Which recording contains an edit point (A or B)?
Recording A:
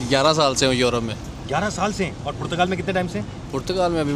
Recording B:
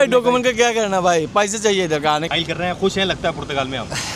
B